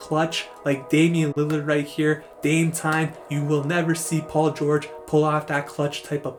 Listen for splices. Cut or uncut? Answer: uncut